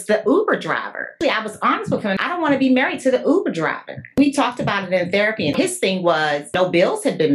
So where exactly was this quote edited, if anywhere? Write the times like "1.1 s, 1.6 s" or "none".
1.1 s, 2.2 s, 4.2 s, 5.6 s, 6.5 s

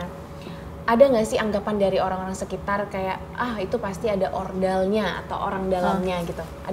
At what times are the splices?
none

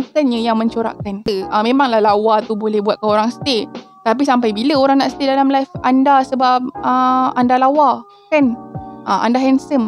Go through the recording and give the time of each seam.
1.2 s

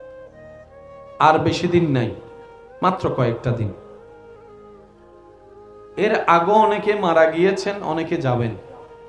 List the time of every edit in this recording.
1.2 s

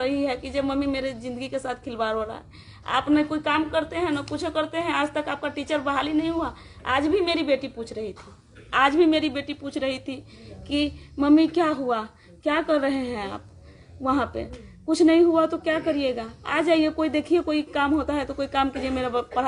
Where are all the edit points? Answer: none

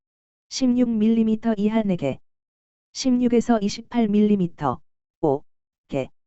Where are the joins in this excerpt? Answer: 5.3 s

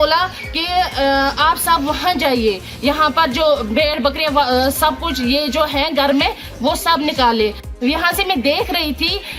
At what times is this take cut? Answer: 7.6 s

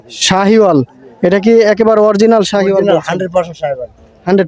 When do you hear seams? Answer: none

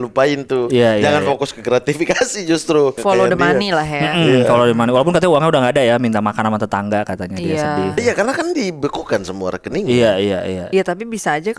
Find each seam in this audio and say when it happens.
3.0 s, 8.0 s, 10.6 s

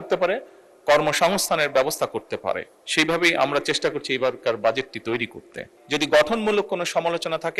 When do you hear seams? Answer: 5.8 s

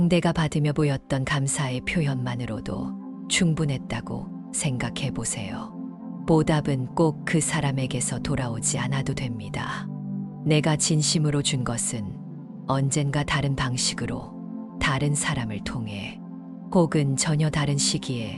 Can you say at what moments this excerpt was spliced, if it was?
none

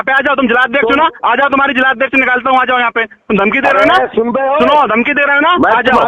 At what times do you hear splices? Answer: none

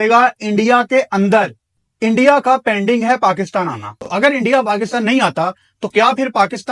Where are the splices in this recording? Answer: 4.0 s

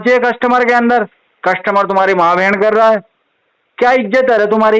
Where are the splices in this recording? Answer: none

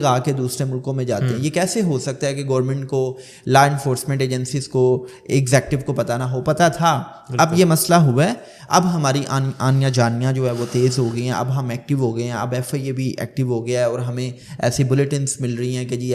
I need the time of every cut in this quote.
none

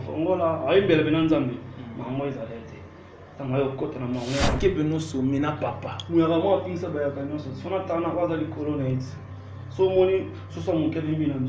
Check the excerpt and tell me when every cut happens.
4.6 s

